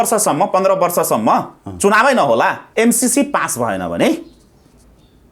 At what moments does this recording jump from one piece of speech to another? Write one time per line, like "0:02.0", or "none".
0:02.6